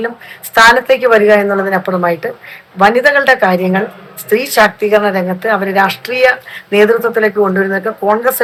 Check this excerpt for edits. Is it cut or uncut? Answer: uncut